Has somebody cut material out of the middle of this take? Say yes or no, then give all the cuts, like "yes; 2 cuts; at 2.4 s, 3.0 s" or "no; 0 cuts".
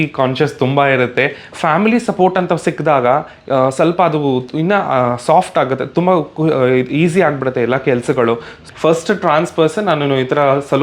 yes; 2 cuts; at 1.5 s, 8.6 s